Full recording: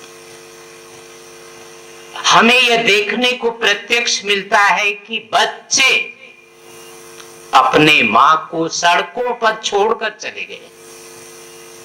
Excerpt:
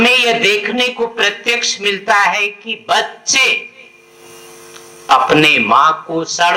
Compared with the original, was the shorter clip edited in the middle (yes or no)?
no